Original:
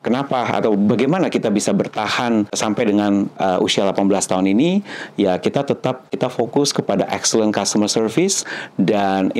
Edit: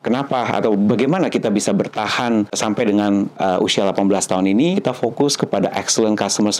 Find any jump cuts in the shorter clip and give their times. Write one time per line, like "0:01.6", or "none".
0:04.8